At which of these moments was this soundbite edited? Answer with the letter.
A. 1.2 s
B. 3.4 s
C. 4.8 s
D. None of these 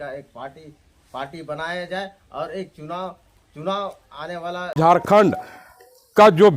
C